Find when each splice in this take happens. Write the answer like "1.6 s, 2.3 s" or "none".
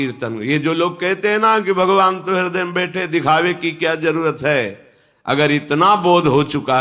none